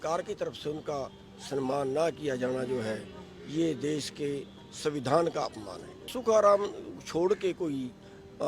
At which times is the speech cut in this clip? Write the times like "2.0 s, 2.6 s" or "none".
6.1 s